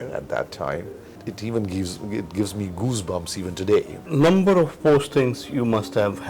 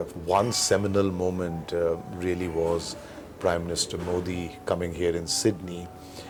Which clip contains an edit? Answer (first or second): first